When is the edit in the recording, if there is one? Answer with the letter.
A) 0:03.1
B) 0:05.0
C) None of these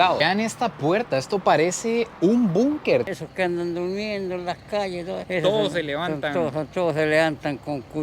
A